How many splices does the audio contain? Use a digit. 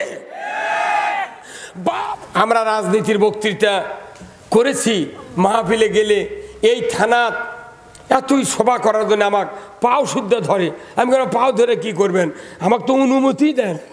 1